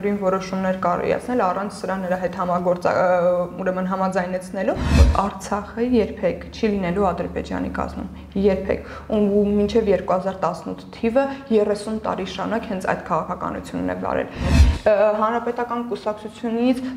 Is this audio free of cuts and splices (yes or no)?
no